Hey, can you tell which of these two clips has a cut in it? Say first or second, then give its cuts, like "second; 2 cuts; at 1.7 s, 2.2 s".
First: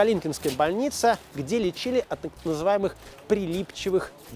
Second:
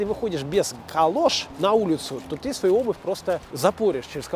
second; 2 cuts; at 1.5 s, 3.5 s